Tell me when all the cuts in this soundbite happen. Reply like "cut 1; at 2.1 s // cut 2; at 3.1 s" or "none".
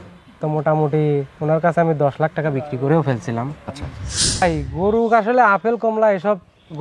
cut 1; at 4.4 s